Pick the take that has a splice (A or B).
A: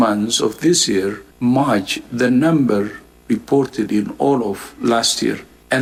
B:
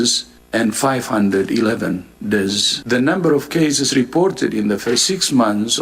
B